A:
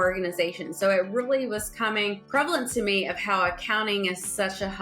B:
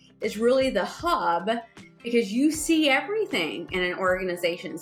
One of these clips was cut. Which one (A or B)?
A